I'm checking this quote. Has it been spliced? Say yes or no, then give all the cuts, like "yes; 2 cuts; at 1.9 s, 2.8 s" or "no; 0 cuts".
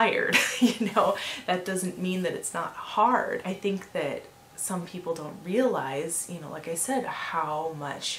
yes; 1 cut; at 3.4 s